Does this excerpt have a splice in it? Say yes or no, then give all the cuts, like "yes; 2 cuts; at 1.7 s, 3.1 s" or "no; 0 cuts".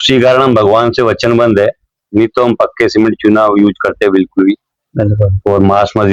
no; 0 cuts